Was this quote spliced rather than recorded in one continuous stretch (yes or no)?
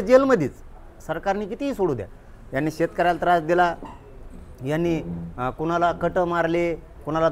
no